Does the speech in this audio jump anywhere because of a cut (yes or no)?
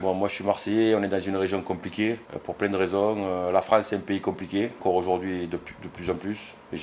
no